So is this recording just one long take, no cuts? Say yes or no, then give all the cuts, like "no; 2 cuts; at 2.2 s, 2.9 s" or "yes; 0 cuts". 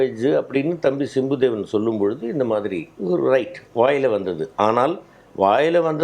no; 1 cut; at 2.9 s